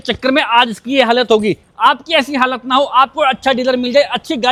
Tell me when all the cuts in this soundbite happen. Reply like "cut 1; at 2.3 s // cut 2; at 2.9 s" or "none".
none